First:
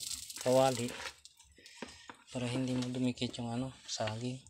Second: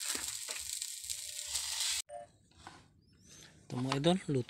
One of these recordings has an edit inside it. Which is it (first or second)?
second